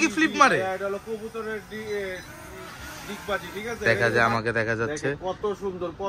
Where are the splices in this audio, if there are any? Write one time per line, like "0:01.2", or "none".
0:03.8